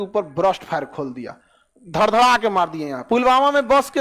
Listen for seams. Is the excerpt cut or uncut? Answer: cut